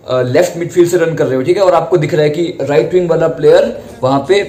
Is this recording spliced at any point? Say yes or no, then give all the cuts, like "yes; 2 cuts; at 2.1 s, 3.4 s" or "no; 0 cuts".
no; 0 cuts